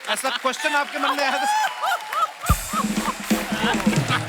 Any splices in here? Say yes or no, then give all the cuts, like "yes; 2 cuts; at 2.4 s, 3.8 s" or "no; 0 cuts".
no; 0 cuts